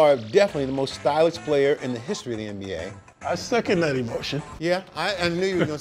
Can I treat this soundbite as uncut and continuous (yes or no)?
no